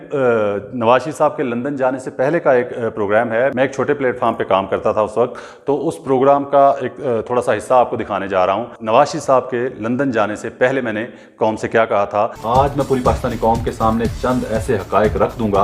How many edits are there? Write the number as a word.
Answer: two